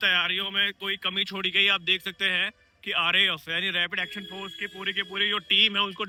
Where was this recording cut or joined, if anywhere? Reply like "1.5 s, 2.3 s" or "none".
none